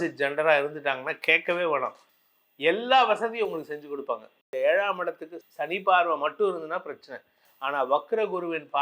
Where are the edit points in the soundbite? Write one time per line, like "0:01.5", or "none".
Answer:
0:04.4